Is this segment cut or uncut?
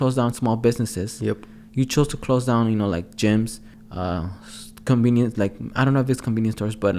uncut